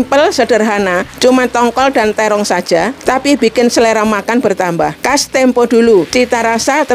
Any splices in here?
yes; 4 cuts; at 1.1 s, 3.0 s, 5.0 s, 6.1 s

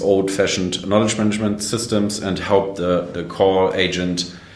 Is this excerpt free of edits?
yes; 0 cuts

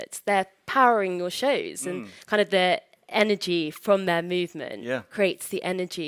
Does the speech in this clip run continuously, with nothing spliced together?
yes; 0 cuts

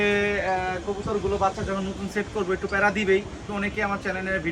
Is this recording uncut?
no; 1 cut; at 3.4 s

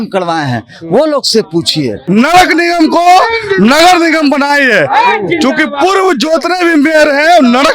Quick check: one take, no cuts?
no; 1 cut; at 2.0 s

